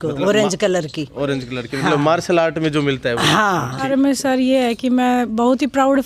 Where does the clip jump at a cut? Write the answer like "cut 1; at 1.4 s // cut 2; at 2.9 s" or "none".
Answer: cut 1; at 3.8 s